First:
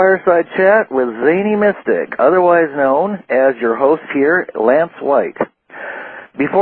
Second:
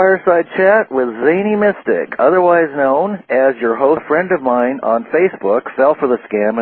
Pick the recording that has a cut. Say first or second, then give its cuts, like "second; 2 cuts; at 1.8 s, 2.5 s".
first; 1 cut; at 4.0 s